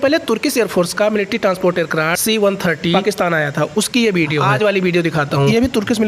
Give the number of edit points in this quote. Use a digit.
0